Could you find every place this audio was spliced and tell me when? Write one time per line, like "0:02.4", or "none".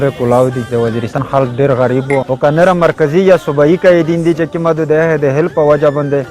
0:01.2
0:02.3

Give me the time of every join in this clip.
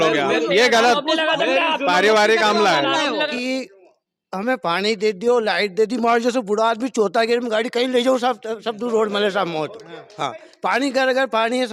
0:03.3

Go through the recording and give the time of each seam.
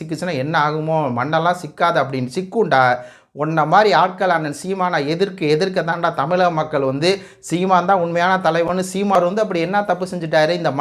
0:09.2

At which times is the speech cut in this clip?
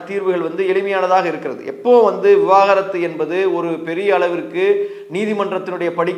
none

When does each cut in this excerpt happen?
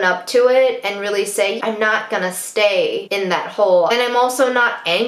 0:01.6
0:03.9

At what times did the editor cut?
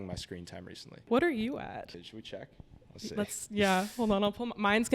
0:01.0
0:01.9

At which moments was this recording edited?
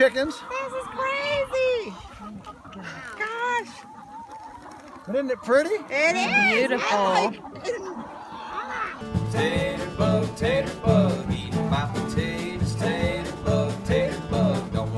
0:09.0

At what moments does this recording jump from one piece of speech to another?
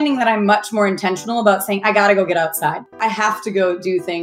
0:03.0

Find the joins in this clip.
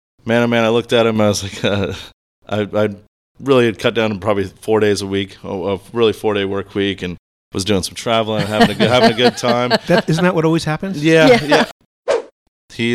0:12.0

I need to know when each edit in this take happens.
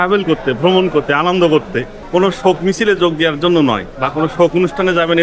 0:02.0
0:03.9

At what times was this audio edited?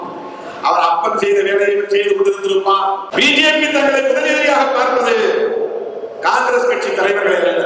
0:03.0

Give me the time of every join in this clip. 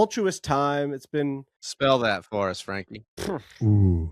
0:01.8

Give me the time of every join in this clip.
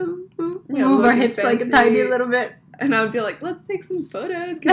none

